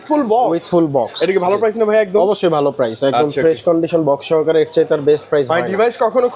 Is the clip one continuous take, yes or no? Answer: yes